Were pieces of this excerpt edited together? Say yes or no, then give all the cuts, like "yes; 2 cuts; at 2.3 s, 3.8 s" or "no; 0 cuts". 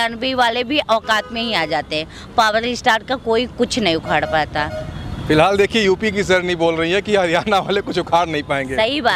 no; 0 cuts